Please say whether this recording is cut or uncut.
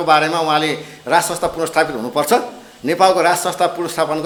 uncut